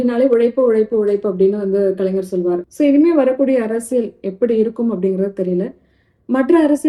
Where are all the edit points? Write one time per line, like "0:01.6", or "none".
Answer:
0:02.7